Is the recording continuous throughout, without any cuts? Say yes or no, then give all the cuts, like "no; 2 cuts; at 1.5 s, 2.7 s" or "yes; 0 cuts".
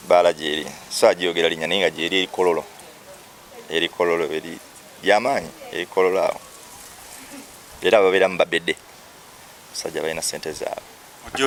yes; 0 cuts